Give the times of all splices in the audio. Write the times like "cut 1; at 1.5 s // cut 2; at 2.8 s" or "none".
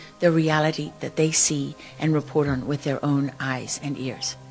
none